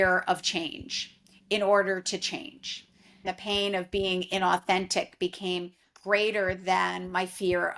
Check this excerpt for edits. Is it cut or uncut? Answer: cut